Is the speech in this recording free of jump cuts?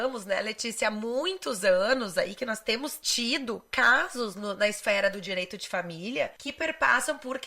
no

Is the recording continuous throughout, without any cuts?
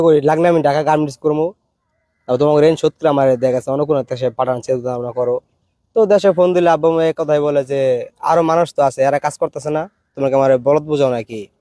yes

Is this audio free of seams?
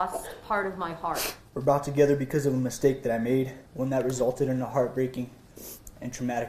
no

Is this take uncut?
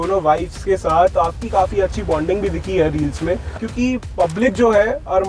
no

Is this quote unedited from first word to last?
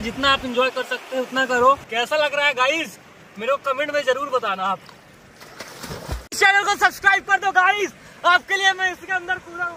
no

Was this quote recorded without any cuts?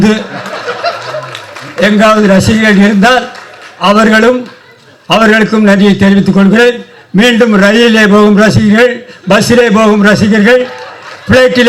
yes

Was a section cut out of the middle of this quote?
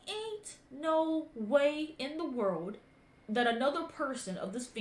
no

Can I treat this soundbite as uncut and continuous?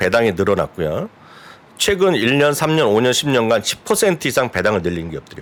yes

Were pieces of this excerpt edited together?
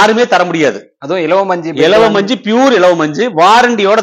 no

